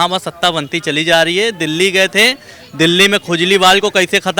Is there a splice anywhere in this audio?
no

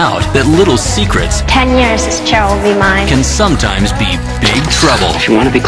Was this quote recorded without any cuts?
no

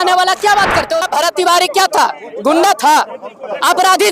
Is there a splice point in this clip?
yes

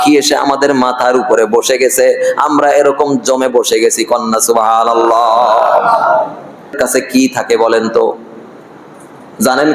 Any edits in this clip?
yes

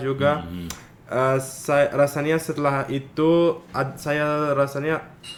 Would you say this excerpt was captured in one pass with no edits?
yes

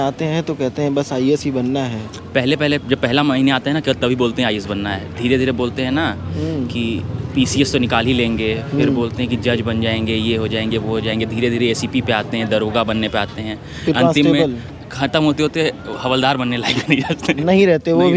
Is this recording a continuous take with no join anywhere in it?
yes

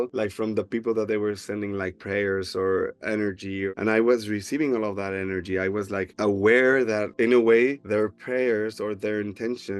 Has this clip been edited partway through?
yes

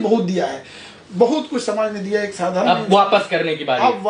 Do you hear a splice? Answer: no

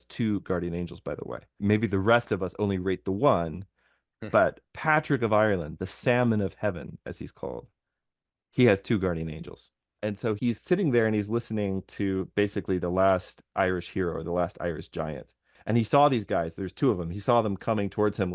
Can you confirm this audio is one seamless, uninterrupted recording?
no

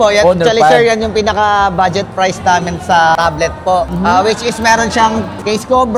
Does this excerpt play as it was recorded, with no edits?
yes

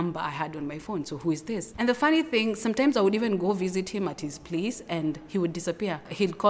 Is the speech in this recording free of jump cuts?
no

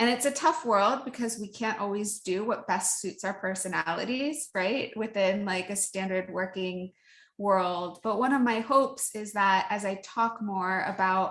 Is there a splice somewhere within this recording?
yes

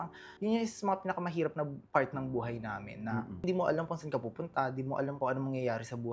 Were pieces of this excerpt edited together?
yes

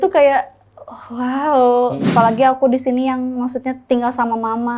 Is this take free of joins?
no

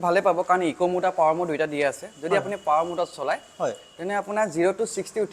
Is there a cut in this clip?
no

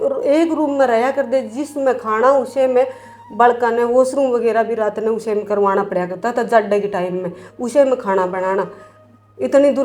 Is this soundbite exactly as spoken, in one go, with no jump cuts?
yes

